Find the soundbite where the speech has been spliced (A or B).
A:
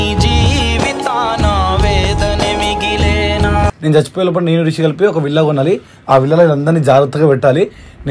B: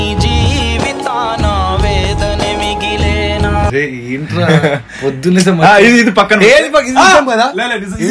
A